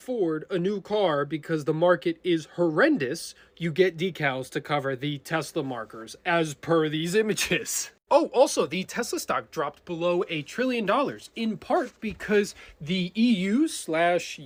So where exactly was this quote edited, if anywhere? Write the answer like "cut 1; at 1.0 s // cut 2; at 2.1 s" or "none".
none

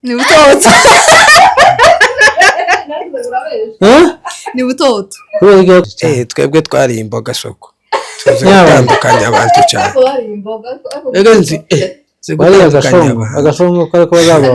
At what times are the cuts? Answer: cut 1; at 5.8 s

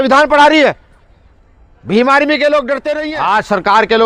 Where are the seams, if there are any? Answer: cut 1; at 3.0 s

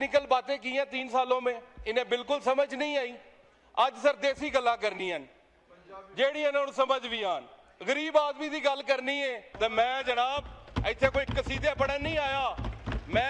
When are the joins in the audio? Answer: cut 1; at 9.4 s

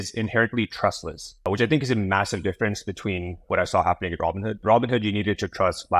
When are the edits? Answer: cut 1; at 1.5 s // cut 2; at 3.4 s // cut 3; at 4.5 s

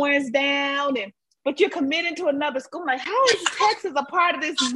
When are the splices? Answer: none

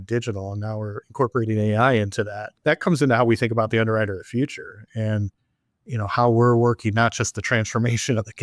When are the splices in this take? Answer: none

